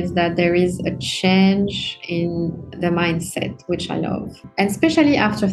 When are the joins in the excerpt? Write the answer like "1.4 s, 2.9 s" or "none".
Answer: 4.4 s